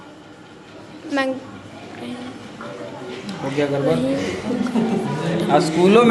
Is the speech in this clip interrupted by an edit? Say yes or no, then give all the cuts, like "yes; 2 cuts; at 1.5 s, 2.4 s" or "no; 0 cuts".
no; 0 cuts